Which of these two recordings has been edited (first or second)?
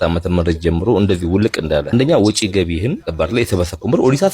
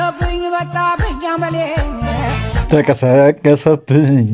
first